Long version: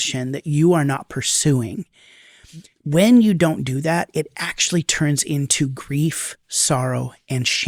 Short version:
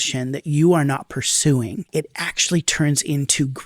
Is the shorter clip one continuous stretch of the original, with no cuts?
no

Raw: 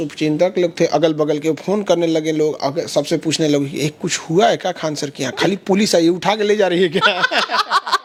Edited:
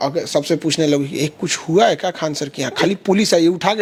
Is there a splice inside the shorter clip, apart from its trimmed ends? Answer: no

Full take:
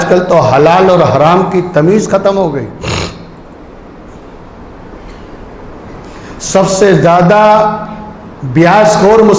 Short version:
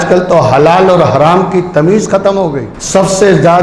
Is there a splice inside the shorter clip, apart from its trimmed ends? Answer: yes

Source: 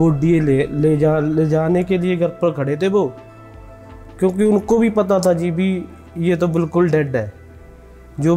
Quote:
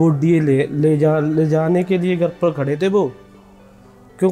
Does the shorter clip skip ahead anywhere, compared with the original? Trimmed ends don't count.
no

